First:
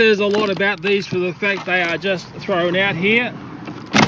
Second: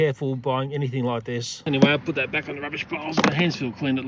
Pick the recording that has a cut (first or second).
second